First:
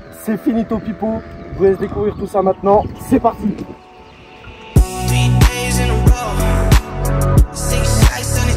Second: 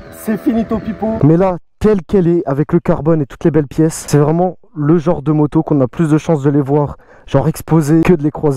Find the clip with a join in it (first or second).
second